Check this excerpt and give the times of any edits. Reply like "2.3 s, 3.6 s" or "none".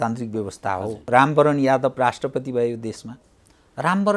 0.9 s